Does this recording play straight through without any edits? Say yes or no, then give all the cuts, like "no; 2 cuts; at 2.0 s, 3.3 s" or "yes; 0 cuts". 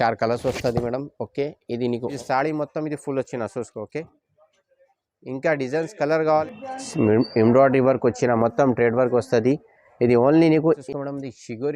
no; 3 cuts; at 2.1 s, 6.3 s, 10.8 s